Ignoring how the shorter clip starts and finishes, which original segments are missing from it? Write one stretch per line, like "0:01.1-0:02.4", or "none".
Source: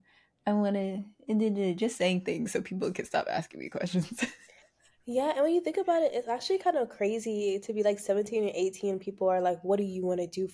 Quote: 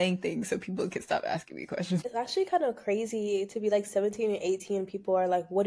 0:04.1-0:06.2